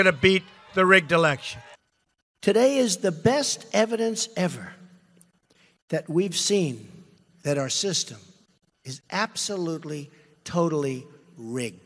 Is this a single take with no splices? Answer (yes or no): yes